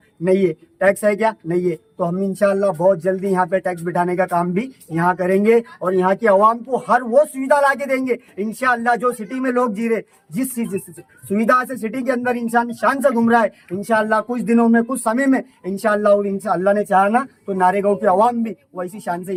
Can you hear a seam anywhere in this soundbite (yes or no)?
no